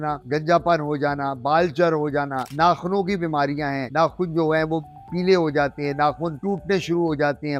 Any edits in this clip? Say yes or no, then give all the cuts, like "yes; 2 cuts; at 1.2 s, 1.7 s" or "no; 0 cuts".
no; 0 cuts